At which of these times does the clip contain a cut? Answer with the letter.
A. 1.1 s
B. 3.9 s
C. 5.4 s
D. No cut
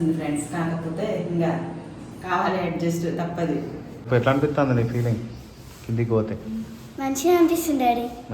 B